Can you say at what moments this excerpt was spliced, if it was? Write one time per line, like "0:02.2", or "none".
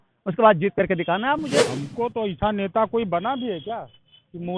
0:01.5